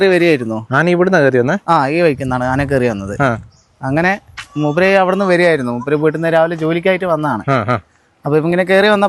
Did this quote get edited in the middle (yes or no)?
no